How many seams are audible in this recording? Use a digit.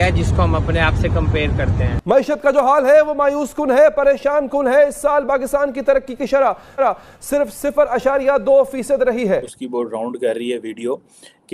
2